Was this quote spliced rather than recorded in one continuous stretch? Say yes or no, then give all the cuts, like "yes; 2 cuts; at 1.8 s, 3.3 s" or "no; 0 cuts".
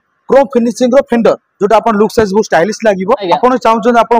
yes; 1 cut; at 3.2 s